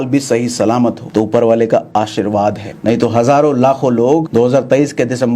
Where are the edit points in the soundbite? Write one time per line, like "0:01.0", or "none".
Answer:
0:01.0
0:02.7
0:04.3